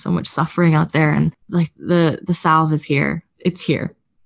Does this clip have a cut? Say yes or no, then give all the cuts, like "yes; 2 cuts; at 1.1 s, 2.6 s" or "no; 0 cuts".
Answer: yes; 2 cuts; at 1.4 s, 3.3 s